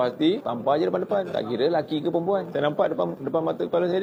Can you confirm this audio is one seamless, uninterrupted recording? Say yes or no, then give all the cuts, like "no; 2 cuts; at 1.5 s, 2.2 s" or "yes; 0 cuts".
yes; 0 cuts